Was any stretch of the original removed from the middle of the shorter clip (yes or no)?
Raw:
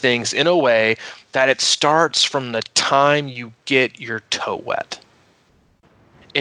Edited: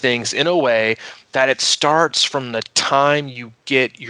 no